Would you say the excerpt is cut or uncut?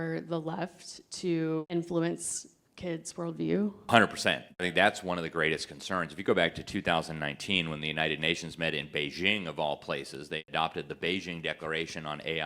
cut